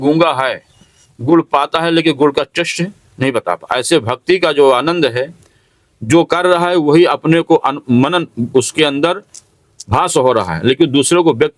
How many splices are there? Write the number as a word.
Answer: zero